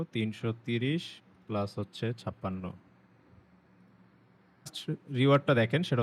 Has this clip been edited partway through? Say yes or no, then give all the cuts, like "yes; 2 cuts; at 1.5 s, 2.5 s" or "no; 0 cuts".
yes; 1 cut; at 4.7 s